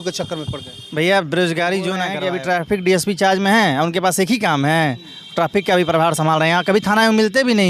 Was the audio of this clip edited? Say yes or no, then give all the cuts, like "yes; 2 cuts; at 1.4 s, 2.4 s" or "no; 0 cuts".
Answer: yes; 1 cut; at 2.1 s